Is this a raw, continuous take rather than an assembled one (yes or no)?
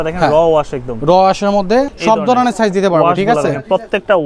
no